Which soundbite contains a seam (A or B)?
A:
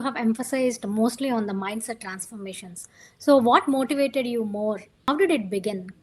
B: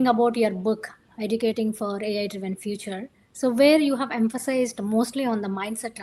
A